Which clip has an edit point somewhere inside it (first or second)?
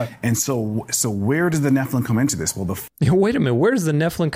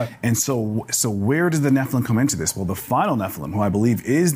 second